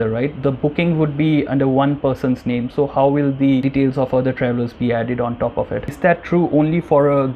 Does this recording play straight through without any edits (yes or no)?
no